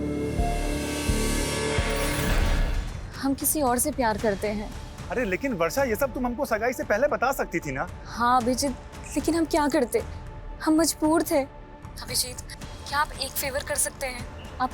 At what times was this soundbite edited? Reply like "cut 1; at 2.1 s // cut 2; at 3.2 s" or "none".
cut 1; at 2.7 s